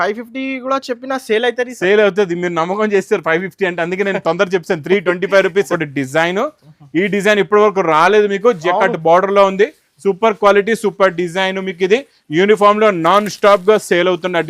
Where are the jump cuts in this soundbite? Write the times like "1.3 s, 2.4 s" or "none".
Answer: 5.8 s